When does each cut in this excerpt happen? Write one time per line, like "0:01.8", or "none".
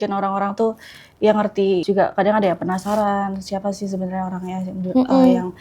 0:01.8